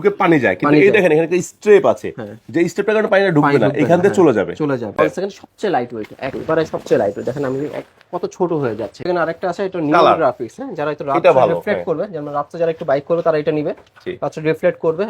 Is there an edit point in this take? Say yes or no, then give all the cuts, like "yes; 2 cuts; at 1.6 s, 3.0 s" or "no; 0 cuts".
yes; 2 cuts; at 4.9 s, 9.0 s